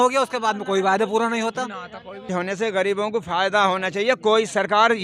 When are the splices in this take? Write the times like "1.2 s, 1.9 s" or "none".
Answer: 2.3 s